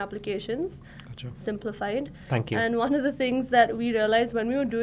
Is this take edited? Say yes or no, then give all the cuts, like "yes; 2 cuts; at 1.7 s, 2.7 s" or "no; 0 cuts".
no; 0 cuts